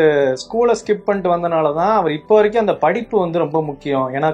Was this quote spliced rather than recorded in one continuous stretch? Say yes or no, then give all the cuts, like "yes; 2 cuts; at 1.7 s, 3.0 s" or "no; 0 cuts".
no; 0 cuts